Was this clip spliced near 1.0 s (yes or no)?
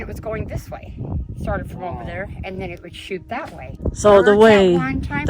no